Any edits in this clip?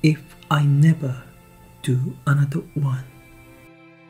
yes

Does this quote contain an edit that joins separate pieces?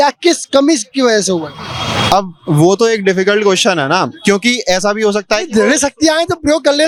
no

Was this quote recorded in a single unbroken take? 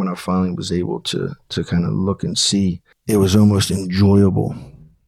no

